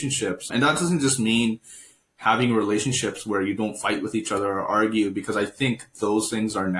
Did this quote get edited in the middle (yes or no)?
no